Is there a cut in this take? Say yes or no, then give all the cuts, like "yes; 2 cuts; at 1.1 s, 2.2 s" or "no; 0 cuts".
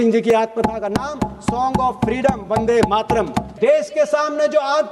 yes; 1 cut; at 3.4 s